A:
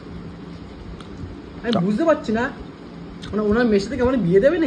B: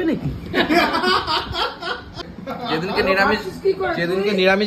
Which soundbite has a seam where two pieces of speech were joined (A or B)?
B